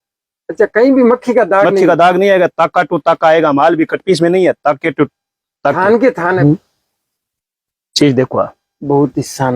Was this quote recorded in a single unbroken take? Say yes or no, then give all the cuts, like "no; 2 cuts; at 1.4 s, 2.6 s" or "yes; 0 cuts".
no; 1 cut; at 6.4 s